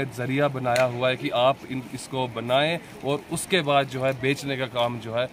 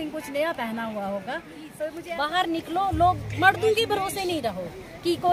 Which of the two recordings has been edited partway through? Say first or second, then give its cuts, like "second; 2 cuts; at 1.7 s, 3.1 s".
second; 1 cut; at 2.0 s